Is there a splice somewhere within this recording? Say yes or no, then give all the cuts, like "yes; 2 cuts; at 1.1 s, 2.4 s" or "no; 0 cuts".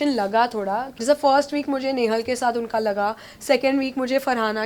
yes; 1 cut; at 0.9 s